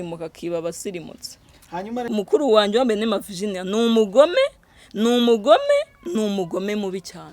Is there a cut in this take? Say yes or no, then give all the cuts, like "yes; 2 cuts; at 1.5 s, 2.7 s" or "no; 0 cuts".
yes; 1 cut; at 2.1 s